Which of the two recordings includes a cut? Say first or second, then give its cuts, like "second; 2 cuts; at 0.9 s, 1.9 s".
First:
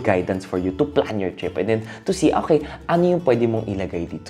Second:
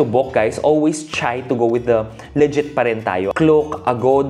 second; 1 cut; at 3.3 s